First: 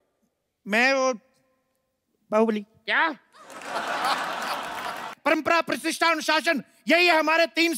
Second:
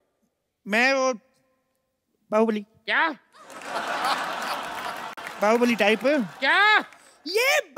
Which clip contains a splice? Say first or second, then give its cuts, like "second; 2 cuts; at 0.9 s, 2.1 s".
first; 1 cut; at 5.1 s